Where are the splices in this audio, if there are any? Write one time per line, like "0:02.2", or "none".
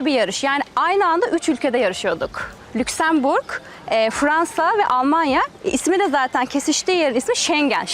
none